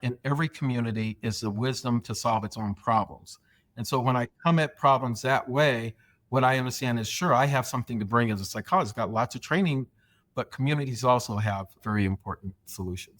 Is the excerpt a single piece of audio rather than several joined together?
no; 2 cuts; at 10.0 s, 11.8 s

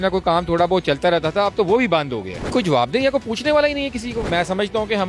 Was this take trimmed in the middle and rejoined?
yes; 2 cuts; at 2.5 s, 4.3 s

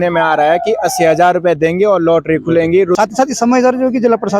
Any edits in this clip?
yes; 1 cut; at 3.0 s

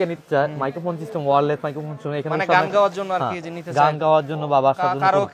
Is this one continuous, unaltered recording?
yes; 0 cuts

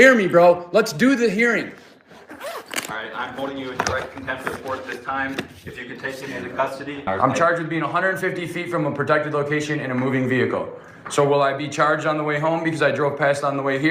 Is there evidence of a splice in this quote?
yes; 1 cut; at 7.1 s

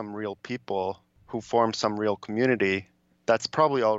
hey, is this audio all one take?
no; 1 cut; at 1.1 s

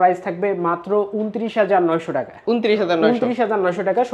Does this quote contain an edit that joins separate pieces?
no; 0 cuts

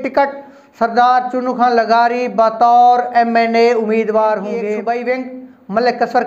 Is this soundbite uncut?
no; 1 cut; at 4.7 s

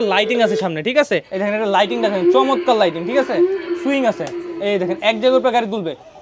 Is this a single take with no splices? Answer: no; 1 cut; at 1.3 s

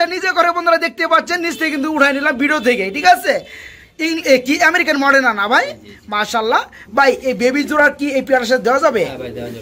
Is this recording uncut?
yes; 0 cuts

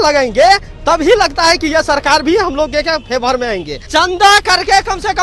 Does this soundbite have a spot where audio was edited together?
yes; 1 cut; at 3.9 s

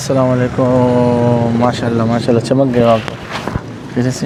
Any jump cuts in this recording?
no; 0 cuts

